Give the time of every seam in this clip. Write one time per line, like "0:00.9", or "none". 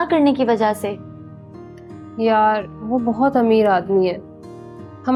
none